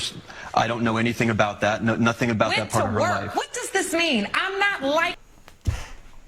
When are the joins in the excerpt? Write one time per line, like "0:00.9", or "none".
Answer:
none